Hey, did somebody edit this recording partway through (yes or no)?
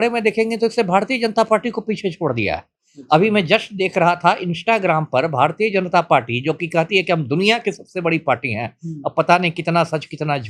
no